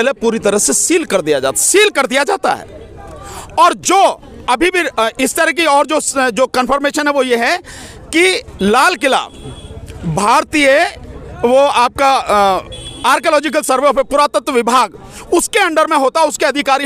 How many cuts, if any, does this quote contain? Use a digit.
0